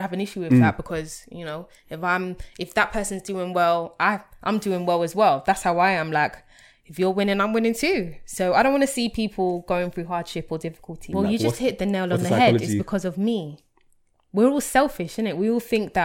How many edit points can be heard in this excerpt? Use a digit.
1